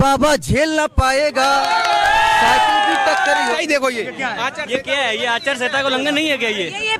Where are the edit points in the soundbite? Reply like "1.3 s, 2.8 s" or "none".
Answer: 3.6 s